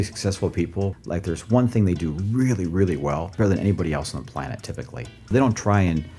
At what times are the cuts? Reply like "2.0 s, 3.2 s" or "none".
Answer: 0.9 s, 5.3 s

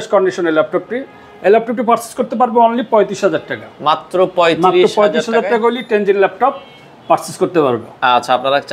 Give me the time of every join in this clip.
none

